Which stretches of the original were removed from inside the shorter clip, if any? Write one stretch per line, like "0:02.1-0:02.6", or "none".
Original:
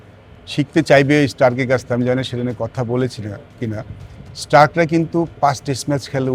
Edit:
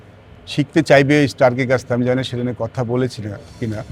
none